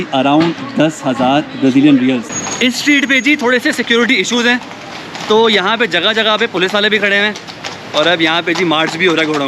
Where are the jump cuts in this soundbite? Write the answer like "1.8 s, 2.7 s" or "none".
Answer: 2.4 s